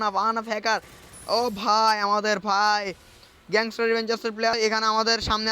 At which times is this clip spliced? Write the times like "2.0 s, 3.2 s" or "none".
4.5 s